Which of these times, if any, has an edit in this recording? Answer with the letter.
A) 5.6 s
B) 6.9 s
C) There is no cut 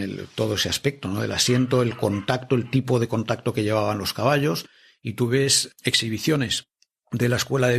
A